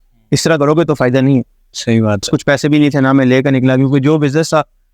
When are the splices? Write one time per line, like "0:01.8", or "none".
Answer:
0:02.2